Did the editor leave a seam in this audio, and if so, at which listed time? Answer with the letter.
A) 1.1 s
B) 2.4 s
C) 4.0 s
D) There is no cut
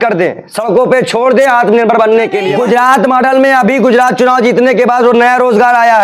B